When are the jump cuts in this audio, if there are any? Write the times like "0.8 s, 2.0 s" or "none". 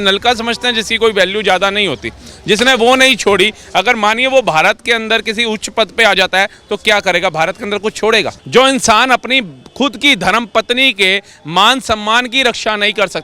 8.3 s